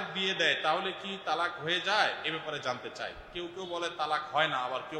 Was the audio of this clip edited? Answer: no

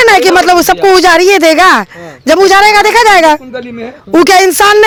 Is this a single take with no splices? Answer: yes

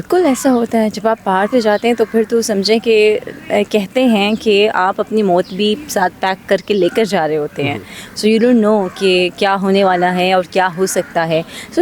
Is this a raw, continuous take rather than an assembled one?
yes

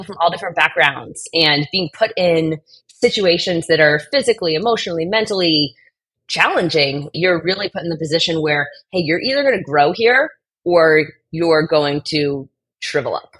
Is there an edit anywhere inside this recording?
no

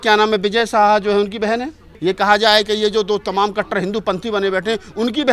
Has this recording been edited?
no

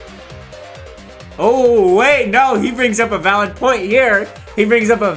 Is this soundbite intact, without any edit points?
yes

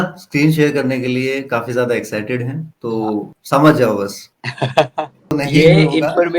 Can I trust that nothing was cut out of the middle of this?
no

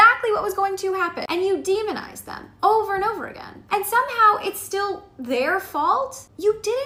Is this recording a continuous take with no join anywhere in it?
yes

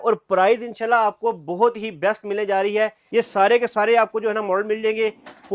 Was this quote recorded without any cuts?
no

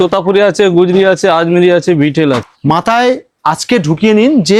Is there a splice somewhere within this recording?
yes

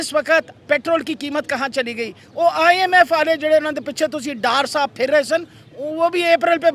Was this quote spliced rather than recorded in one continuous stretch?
no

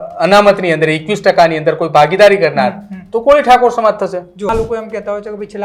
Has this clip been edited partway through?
yes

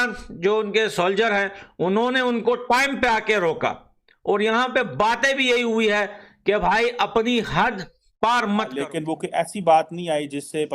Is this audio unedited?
no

